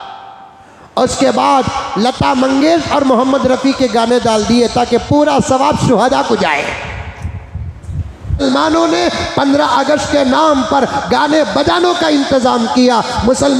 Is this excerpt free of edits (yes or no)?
no